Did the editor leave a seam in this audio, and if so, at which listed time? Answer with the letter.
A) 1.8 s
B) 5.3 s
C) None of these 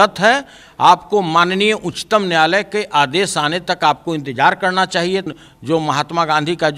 B